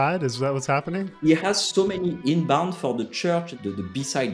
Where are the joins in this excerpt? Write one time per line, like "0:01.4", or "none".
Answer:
0:01.1
0:03.5